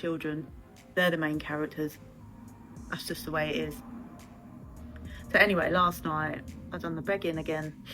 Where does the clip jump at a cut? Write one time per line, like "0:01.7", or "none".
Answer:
0:04.8

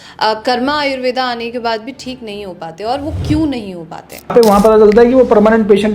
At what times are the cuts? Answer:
0:04.3

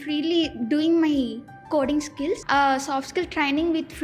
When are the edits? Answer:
0:02.4

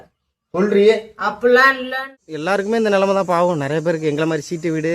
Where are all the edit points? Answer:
0:02.1

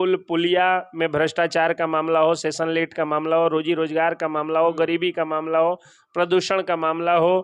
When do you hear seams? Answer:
none

